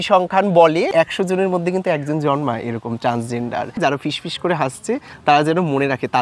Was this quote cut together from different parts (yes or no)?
yes